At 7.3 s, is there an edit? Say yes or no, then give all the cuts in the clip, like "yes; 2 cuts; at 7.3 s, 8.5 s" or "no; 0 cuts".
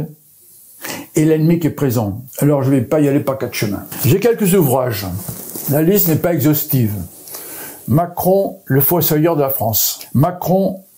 no; 3 cuts; at 2.2 s, 3.9 s, 9.9 s